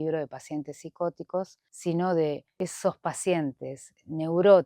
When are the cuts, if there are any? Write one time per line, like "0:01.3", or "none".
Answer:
0:01.6
0:02.5